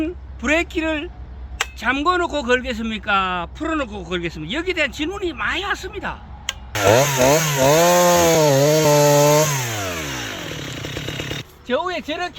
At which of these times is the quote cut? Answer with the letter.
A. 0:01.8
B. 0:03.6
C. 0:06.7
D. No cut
C